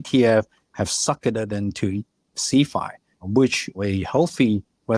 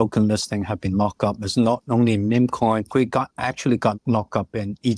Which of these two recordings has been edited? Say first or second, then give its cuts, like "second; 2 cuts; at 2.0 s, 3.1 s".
second; 2 cuts; at 2.9 s, 4.0 s